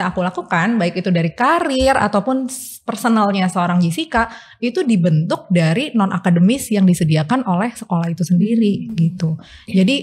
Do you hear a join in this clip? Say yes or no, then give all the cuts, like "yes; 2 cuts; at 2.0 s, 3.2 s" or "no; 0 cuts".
no; 0 cuts